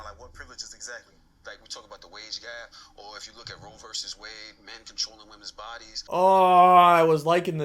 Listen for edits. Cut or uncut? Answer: cut